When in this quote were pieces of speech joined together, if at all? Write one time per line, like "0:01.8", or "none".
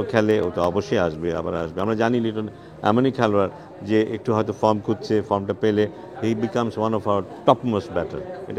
none

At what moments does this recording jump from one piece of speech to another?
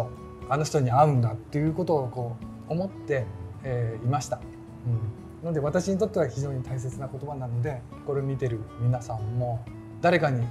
none

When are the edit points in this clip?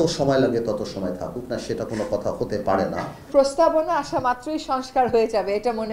0:03.2

